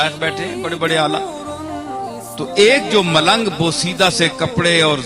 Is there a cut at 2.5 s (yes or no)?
yes